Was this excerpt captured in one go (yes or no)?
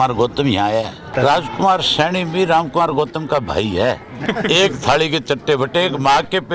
no